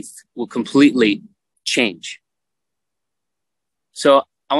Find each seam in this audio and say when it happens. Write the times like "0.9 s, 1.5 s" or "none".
none